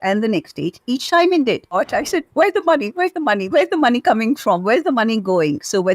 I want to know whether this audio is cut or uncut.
cut